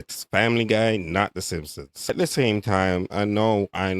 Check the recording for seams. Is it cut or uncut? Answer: cut